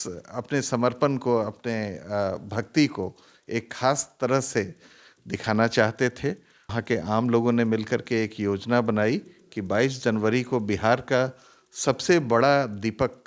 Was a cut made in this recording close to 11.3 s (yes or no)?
no